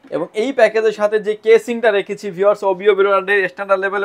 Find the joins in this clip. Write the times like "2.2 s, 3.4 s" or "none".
none